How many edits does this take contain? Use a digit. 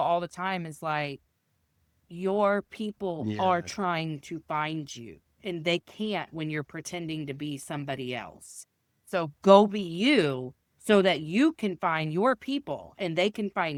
0